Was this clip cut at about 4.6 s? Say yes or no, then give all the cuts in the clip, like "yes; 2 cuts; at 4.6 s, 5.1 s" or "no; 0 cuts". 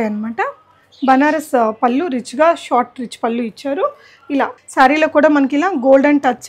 yes; 1 cut; at 4.6 s